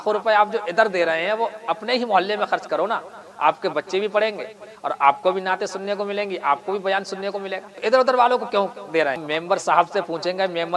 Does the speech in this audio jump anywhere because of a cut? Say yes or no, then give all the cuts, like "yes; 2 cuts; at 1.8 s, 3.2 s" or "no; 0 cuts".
yes; 2 cuts; at 7.7 s, 9.3 s